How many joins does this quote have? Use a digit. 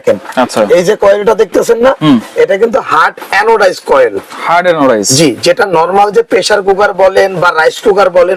0